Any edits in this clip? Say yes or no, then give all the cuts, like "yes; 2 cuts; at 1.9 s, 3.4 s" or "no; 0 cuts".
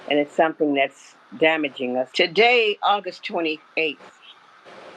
yes; 1 cut; at 2.1 s